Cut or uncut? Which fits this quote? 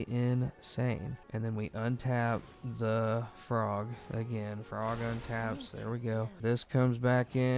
cut